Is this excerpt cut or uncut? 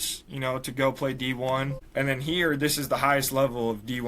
cut